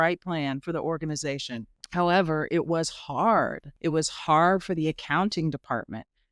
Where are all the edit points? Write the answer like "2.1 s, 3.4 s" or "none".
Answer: 1.8 s, 3.6 s